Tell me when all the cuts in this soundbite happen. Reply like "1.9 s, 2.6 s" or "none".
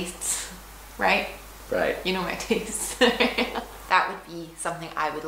3.6 s